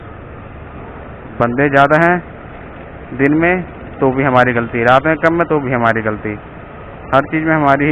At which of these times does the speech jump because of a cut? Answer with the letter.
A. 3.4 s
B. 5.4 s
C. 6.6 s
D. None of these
D